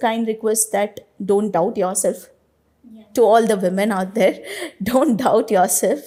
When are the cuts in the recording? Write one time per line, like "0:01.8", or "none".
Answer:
none

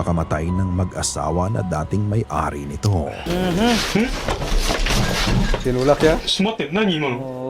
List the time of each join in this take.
0:03.2

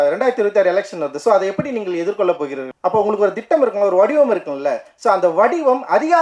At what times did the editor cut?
0:02.7

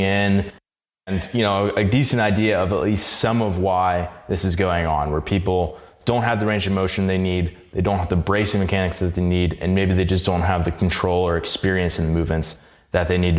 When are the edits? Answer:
0:01.0

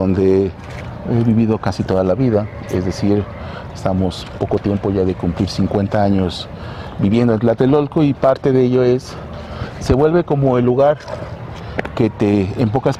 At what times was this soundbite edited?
none

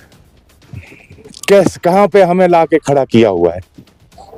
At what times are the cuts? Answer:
none

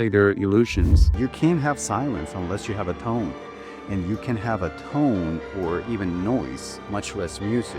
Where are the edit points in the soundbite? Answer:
0:01.1

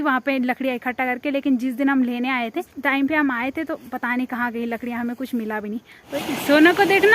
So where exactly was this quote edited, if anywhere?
0:02.7
0:06.2

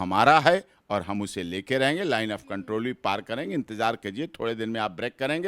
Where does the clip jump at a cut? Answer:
none

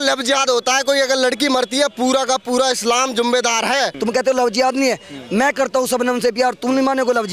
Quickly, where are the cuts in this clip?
0:03.9

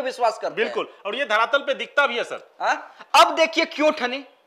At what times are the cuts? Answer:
none

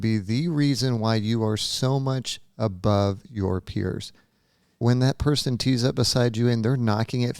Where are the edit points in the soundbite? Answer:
0:04.8

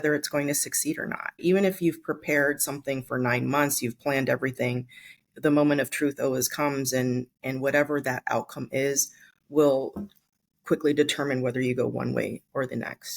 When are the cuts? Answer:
0:01.4

